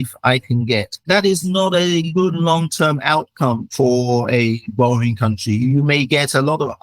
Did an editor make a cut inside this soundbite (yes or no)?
yes